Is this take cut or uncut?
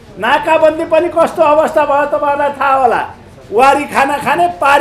uncut